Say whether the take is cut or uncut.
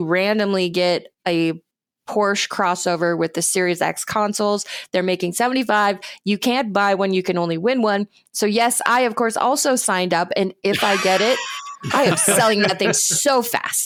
uncut